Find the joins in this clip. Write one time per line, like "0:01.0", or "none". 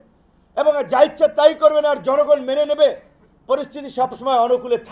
none